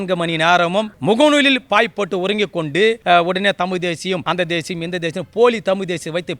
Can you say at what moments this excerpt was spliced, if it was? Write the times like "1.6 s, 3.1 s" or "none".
0.9 s, 3.0 s, 4.2 s

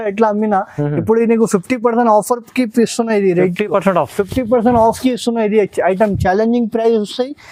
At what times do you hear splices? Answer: none

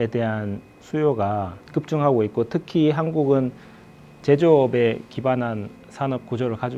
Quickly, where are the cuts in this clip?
1.6 s

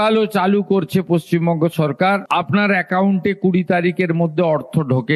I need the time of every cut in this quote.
none

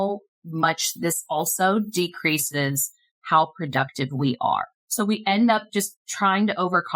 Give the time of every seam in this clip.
4.8 s

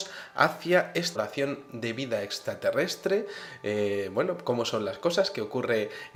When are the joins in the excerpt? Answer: none

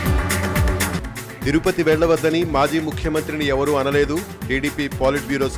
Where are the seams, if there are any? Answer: 0.9 s

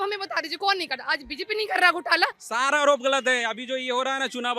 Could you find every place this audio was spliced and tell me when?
2.4 s

